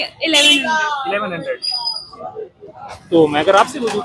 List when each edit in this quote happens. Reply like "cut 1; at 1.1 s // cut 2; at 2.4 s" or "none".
none